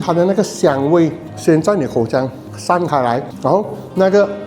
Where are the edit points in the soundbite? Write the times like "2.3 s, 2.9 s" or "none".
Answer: 3.3 s